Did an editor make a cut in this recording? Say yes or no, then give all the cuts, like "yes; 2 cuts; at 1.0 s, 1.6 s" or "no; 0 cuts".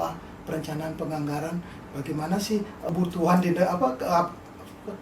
yes; 1 cut; at 2.9 s